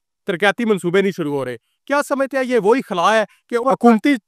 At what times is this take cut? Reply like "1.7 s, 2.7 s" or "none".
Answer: none

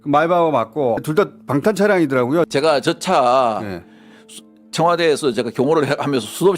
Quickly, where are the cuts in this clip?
1.0 s, 2.5 s

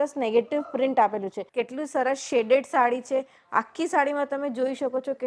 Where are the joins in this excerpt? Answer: 1.4 s

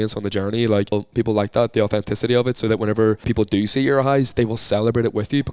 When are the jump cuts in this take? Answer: 0.9 s, 3.3 s

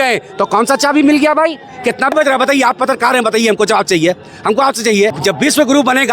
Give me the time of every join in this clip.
2.1 s, 5.2 s

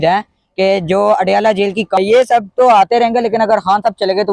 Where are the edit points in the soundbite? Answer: 2.0 s

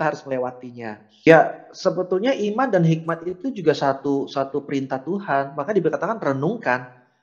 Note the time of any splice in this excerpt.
1.3 s

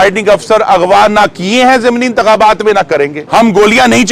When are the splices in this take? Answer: 3.2 s

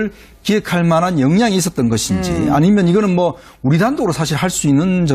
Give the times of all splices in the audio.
3.4 s

